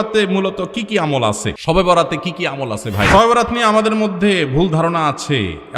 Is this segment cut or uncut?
cut